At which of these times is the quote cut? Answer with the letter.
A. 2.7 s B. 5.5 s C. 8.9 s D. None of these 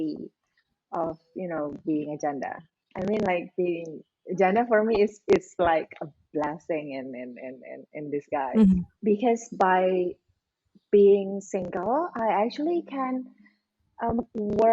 C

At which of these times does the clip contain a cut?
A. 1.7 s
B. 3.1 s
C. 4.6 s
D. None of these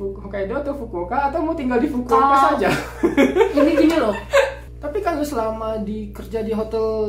C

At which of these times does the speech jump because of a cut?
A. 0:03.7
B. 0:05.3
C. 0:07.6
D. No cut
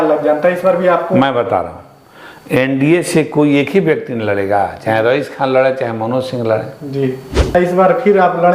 C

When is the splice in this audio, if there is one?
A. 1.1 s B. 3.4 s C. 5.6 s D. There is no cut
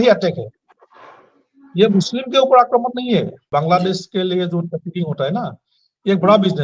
B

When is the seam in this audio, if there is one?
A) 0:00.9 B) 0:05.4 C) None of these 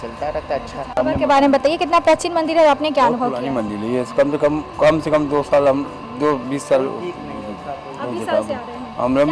C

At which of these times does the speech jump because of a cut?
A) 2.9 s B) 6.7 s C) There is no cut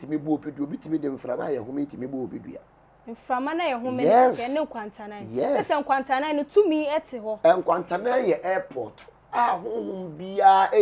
C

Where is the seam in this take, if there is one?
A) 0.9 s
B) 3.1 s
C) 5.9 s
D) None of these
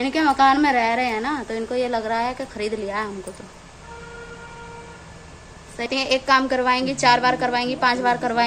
C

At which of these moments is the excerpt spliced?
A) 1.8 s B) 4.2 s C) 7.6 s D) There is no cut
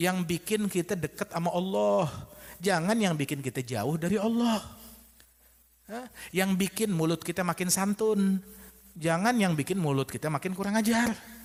D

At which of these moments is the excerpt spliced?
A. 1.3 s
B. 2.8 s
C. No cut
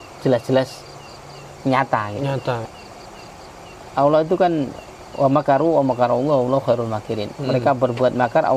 B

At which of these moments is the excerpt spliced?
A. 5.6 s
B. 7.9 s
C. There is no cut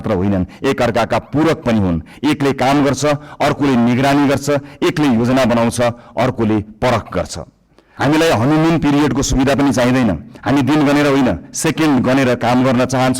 B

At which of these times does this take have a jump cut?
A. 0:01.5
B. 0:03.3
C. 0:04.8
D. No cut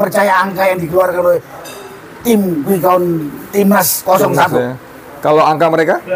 D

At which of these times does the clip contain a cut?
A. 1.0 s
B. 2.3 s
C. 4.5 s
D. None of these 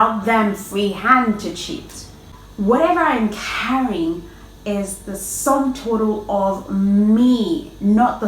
B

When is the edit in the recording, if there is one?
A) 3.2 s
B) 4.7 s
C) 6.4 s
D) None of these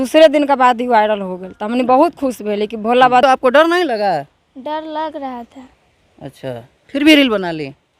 A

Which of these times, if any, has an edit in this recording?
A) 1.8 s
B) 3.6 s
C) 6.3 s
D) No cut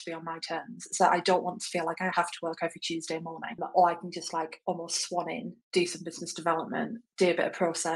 B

